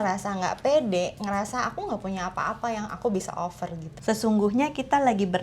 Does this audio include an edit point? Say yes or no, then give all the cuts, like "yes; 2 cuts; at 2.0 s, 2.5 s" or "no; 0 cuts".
yes; 1 cut; at 3.9 s